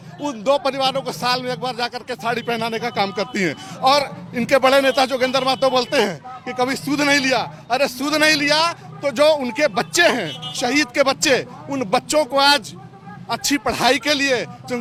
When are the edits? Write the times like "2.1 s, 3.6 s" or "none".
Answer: none